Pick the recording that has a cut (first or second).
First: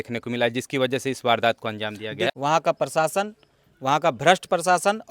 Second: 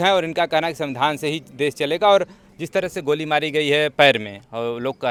first